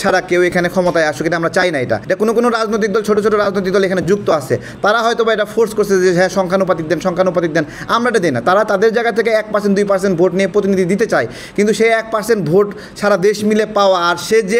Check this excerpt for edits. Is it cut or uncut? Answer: uncut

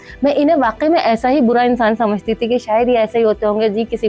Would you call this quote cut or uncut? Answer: uncut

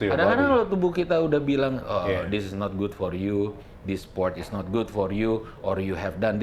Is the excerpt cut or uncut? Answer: uncut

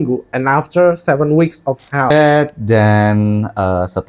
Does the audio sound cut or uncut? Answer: cut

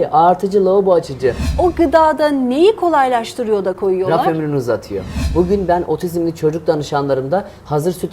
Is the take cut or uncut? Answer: cut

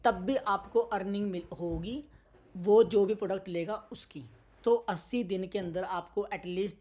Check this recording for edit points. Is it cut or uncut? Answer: cut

